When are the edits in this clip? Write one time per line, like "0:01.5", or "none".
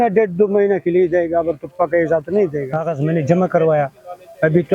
0:02.8